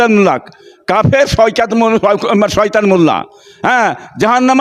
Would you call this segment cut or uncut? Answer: uncut